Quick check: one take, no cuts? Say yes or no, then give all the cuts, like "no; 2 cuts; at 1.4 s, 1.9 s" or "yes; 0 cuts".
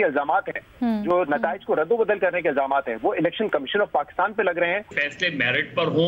no; 1 cut; at 5.0 s